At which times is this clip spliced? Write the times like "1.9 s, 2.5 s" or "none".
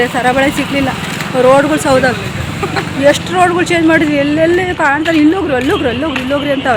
none